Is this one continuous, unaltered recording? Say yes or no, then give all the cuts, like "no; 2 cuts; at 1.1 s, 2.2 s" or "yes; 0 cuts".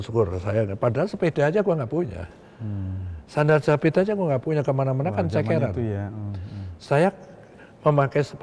yes; 0 cuts